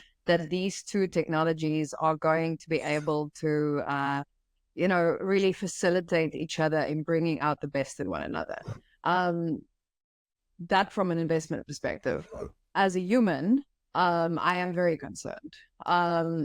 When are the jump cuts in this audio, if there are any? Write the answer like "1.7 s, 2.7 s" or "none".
none